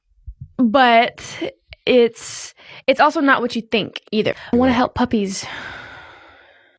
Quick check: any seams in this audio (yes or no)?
yes